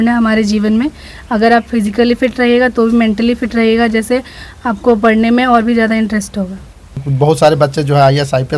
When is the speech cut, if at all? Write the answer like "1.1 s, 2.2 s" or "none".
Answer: none